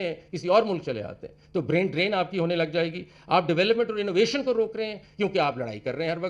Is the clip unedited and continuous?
yes; 0 cuts

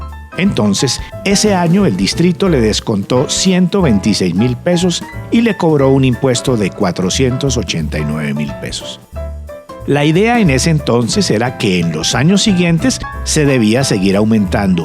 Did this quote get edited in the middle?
yes; 1 cut; at 4.0 s

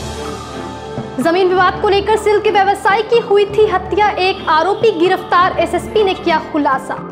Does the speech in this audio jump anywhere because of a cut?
yes; 1 cut; at 1.1 s

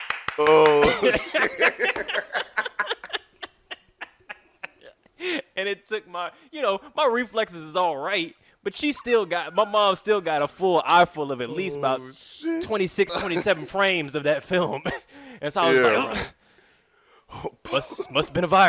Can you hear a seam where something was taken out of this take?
no; 0 cuts

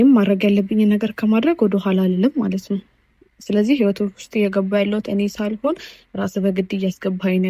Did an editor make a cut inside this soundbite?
no; 0 cuts

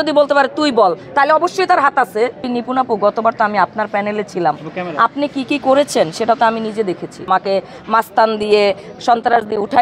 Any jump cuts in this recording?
yes; 2 cuts; at 2.5 s, 7.3 s

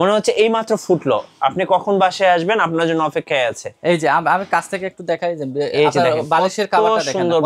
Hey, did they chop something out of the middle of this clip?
no; 0 cuts

